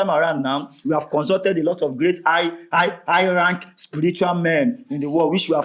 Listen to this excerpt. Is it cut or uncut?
uncut